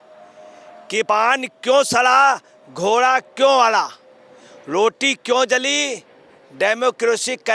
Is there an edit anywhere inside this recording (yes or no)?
yes